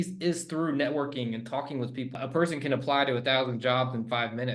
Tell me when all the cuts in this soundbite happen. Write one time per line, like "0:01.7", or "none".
0:02.1